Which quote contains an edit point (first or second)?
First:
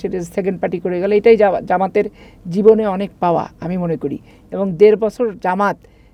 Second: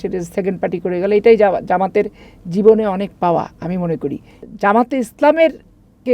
second